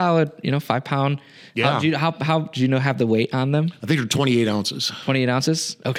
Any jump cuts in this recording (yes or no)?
no